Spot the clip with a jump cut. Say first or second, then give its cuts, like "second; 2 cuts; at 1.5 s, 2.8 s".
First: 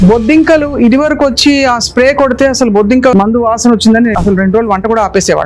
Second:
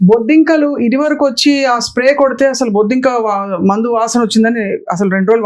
first; 2 cuts; at 3.1 s, 4.1 s